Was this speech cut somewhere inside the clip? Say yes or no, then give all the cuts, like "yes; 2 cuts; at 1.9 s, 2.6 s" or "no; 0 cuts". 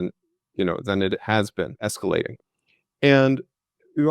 yes; 1 cut; at 1.9 s